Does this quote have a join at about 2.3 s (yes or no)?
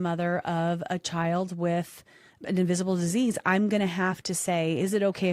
yes